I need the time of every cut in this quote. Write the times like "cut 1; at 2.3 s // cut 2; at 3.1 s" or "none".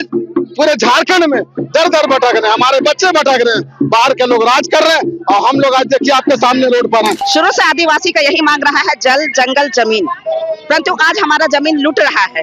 cut 1; at 7.2 s